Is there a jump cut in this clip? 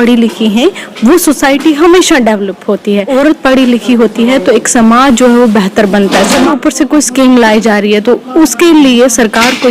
yes; 2 cuts; at 3.1 s, 6.5 s

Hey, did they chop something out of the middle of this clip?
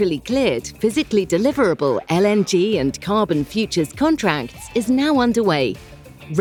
no; 0 cuts

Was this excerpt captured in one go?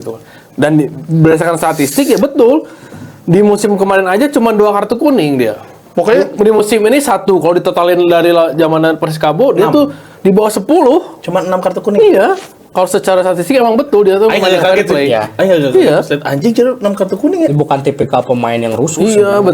yes; 0 cuts

